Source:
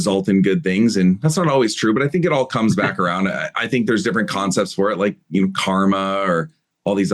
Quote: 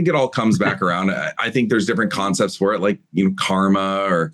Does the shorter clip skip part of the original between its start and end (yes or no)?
no